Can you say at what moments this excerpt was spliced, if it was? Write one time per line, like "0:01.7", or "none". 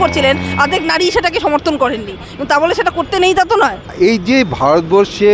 0:03.8

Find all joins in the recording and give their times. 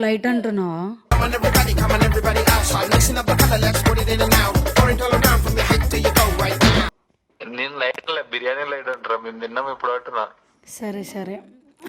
none

